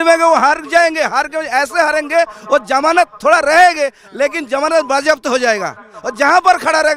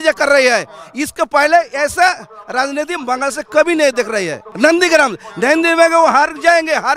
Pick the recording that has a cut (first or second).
second